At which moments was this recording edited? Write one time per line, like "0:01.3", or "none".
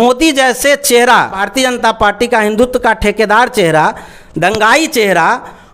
0:01.4